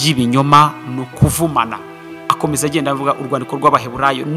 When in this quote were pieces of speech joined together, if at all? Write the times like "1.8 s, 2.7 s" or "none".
2.1 s